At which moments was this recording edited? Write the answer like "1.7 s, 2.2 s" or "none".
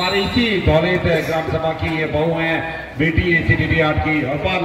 none

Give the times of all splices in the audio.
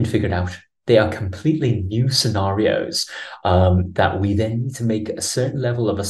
none

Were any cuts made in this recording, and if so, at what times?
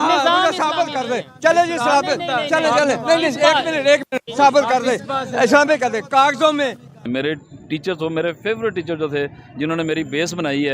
7.0 s

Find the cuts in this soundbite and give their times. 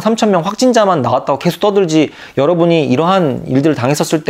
none

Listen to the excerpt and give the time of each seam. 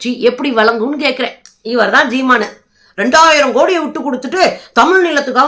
1.4 s

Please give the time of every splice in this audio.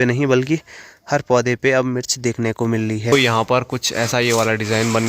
3.1 s

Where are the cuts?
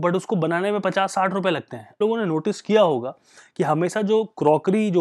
2.0 s

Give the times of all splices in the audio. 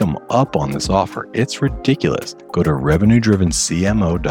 2.4 s

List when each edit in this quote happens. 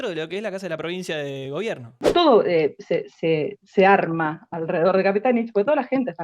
2.1 s

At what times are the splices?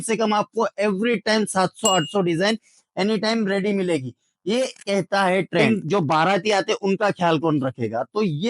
5.7 s

